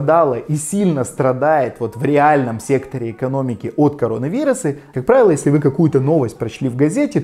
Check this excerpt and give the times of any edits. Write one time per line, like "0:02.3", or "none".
0:04.9